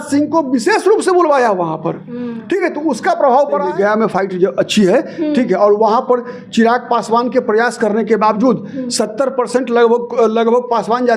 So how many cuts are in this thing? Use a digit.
1